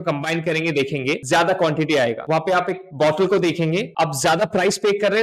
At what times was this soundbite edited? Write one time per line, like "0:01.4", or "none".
0:01.2
0:02.2
0:03.9